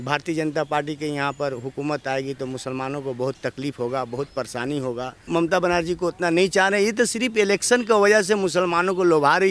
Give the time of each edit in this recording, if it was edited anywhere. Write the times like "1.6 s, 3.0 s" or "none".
5.2 s